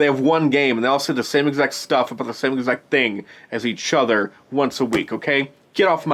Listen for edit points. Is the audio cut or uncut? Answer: uncut